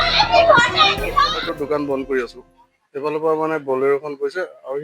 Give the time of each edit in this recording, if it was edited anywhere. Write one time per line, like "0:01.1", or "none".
0:01.2